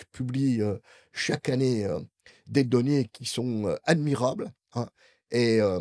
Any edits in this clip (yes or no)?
no